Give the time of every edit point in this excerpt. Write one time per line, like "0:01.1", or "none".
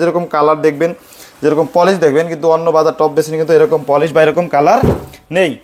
none